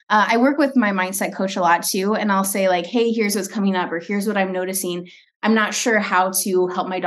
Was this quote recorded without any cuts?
yes; 0 cuts

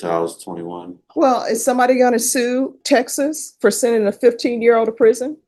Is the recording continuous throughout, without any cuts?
yes; 0 cuts

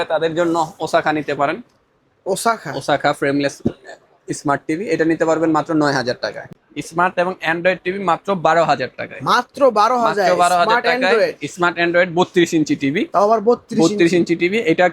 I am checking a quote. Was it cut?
yes; 1 cut; at 6.5 s

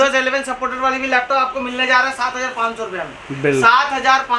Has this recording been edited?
no; 0 cuts

